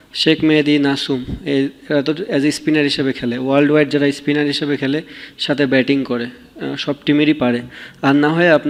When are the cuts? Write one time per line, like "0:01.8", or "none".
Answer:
none

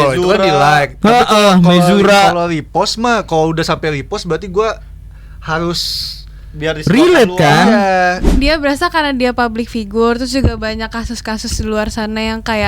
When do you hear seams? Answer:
0:08.4

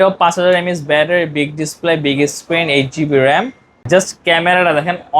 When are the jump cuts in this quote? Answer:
0:03.7

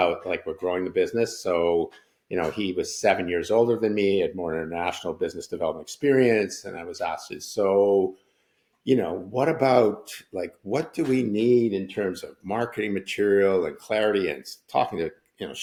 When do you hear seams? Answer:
none

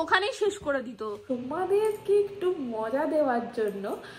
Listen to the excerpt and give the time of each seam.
0:01.2

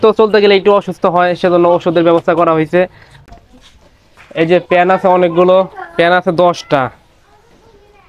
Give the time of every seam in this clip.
0:03.1

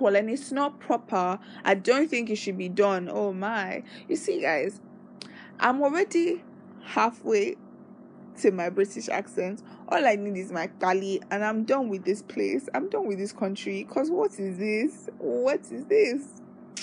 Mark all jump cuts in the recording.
none

